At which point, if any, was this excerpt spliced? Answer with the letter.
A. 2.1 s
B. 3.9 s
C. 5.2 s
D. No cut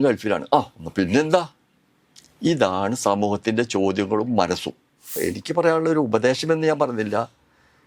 C